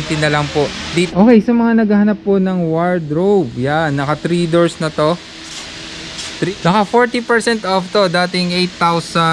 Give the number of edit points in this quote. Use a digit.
2